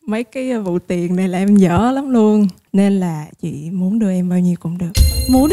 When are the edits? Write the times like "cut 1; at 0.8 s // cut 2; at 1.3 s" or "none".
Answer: cut 1; at 2.6 s